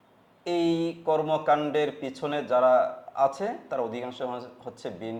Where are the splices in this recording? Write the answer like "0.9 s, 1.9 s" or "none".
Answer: none